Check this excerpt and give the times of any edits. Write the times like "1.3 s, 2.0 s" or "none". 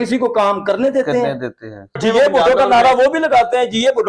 2.0 s